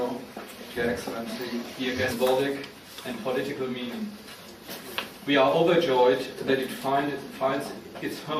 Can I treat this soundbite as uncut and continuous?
yes; 0 cuts

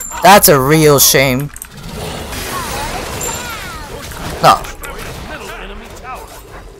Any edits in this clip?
yes; 1 cut; at 2.3 s

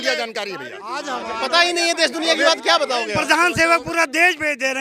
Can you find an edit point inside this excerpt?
yes; 1 cut; at 3.2 s

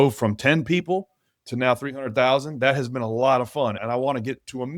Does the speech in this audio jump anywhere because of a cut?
yes; 1 cut; at 3.8 s

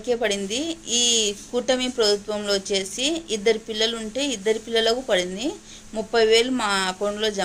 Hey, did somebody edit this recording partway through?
no; 0 cuts

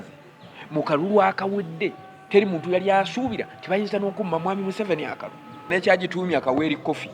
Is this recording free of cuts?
no; 1 cut; at 5.7 s

